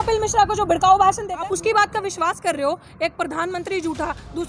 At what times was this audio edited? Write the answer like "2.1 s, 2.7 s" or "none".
1.3 s